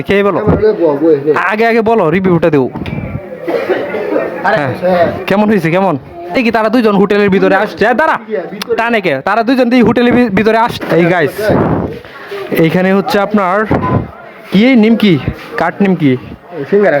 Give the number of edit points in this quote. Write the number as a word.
two